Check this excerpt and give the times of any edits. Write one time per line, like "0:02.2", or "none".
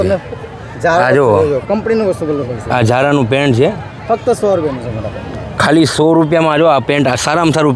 none

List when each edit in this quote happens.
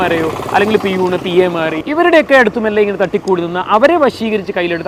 none

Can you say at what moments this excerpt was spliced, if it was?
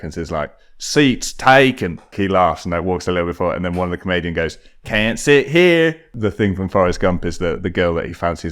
0:02.1
0:06.1

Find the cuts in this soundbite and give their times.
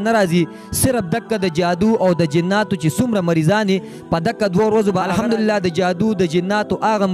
0:05.0

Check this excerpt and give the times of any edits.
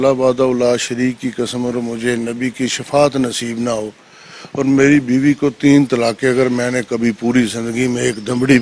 none

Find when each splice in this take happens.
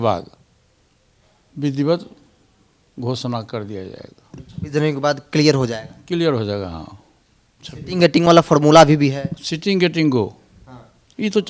none

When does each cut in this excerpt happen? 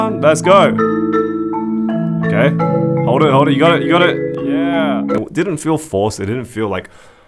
0:05.2

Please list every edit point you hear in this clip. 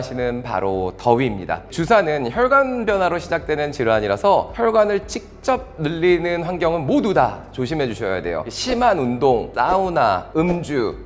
none

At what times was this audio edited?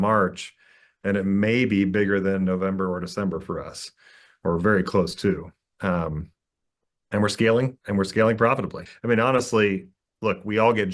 0:08.9

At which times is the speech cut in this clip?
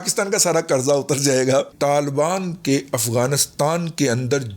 0:01.7

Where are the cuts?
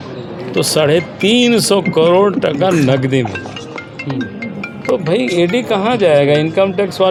none

